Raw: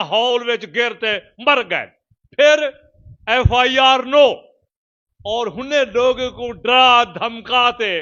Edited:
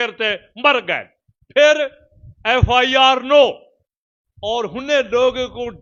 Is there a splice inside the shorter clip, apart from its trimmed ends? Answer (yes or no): no